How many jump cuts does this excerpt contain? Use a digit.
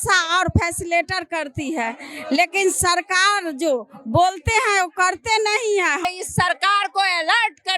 1